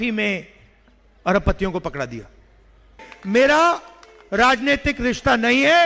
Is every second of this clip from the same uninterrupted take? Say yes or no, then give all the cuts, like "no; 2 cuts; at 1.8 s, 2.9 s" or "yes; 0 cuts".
no; 1 cut; at 3.1 s